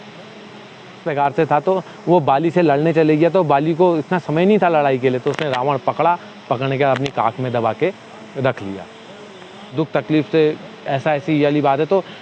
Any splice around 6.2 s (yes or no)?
no